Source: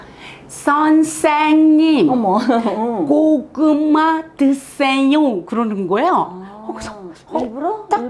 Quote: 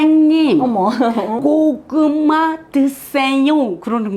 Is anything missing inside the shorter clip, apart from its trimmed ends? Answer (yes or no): yes